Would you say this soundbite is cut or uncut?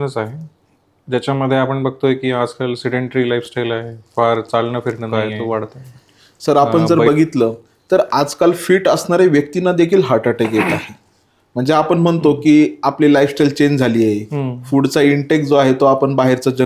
cut